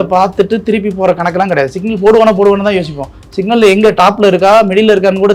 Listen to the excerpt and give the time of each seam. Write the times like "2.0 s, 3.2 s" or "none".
none